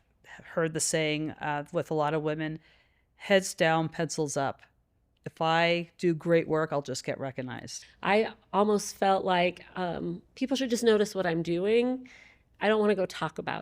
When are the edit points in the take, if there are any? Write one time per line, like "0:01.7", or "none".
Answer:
0:07.7